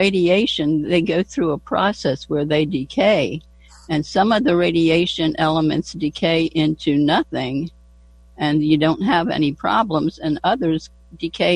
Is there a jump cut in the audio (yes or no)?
no